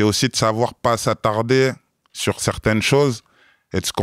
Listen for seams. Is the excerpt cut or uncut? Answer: uncut